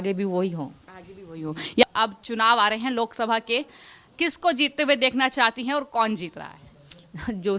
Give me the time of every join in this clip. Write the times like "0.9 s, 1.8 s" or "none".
1.8 s